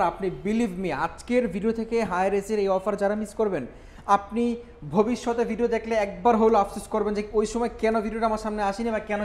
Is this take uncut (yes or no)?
yes